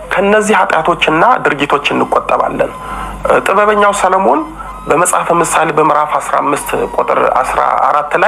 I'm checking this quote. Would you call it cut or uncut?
uncut